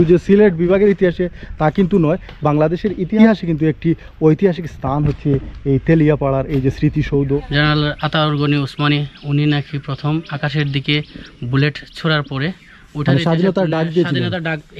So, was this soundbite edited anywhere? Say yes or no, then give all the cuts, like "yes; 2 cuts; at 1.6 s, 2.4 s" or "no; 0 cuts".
yes; 2 cuts; at 3.2 s, 7.5 s